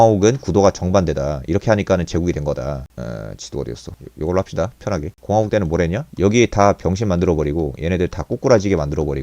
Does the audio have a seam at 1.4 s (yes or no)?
no